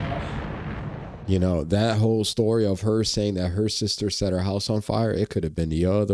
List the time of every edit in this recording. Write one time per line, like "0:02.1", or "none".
0:01.2